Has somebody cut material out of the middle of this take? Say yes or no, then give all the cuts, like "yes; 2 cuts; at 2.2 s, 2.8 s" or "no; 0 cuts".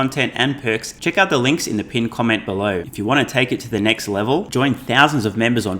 yes; 2 cuts; at 0.9 s, 2.9 s